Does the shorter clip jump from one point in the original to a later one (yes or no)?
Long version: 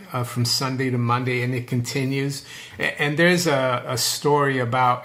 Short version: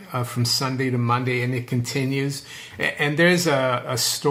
no